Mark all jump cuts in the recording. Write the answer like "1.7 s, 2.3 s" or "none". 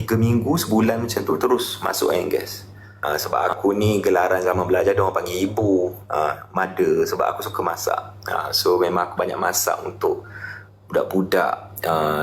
2.9 s